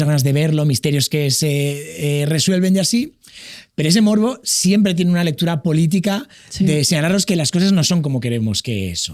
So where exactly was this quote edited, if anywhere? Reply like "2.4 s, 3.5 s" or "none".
none